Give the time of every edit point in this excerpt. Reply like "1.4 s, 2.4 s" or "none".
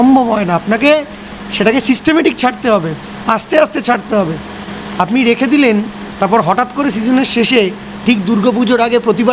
none

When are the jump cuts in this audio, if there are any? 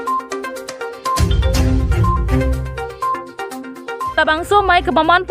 none

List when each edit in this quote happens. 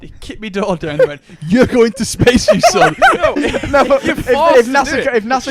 none

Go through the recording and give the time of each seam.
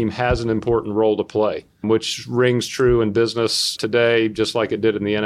1.8 s, 3.8 s

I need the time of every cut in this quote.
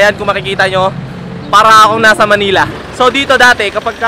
2.8 s

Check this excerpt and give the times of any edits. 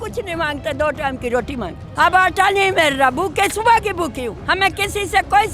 1.8 s, 4.4 s

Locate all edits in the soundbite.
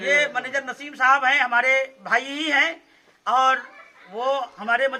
none

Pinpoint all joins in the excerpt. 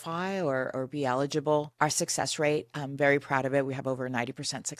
1.7 s

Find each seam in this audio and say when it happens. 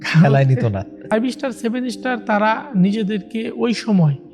1.0 s

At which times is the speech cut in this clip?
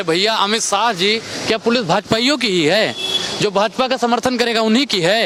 none

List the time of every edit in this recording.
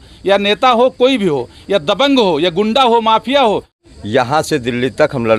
3.8 s

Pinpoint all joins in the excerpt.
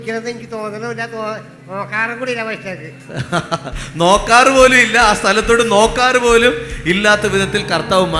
none

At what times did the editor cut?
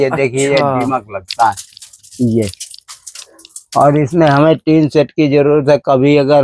none

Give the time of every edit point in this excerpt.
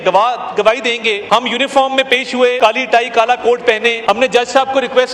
1.2 s, 2.6 s, 4.0 s

